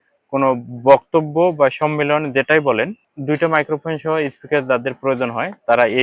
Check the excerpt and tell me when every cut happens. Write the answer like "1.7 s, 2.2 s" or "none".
3.1 s